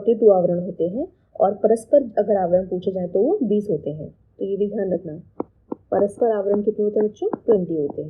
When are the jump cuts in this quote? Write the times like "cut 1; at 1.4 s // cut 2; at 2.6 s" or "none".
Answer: none